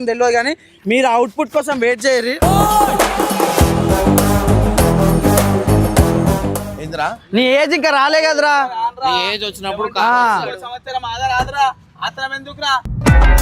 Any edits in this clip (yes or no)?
yes